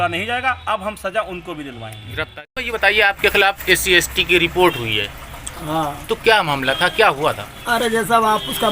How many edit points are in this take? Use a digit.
1